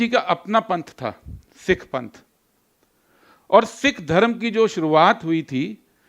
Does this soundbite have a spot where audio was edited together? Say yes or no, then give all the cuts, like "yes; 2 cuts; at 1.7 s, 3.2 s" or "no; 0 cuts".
no; 0 cuts